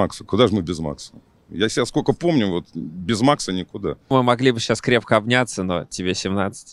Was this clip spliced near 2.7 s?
no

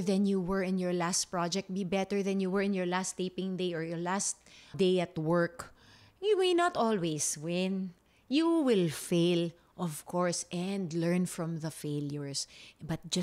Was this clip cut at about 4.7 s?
yes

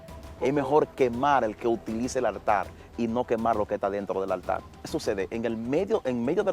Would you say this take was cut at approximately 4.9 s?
yes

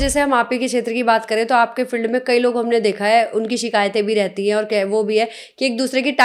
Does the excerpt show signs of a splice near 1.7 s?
no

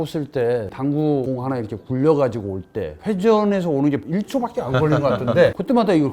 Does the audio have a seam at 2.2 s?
no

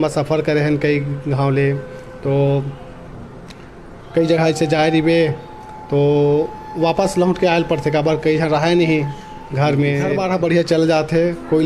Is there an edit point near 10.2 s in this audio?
yes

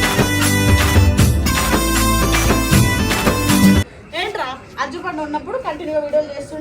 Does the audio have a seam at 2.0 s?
no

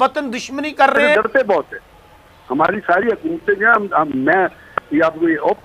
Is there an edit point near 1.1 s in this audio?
yes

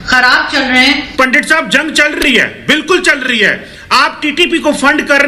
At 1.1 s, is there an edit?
yes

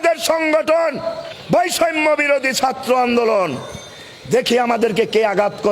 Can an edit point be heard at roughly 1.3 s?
yes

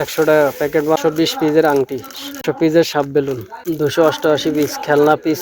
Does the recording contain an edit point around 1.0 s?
yes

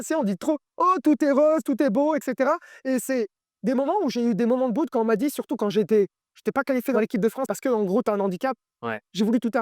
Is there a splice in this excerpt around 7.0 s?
yes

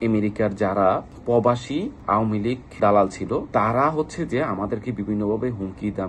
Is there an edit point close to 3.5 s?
yes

